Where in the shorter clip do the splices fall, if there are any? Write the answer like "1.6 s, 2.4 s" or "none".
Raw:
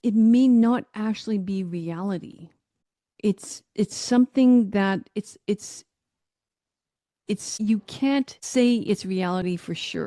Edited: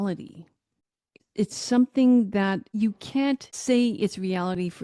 1.1 s, 2.7 s